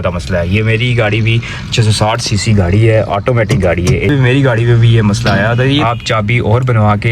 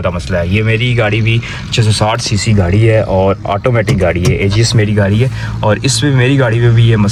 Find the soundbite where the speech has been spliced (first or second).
first